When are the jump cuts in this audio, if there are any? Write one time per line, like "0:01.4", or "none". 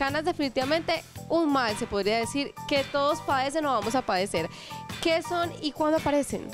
none